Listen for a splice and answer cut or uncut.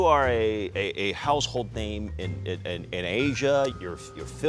uncut